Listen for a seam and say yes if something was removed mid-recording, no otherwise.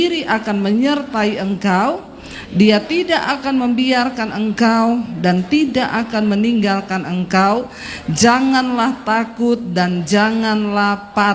no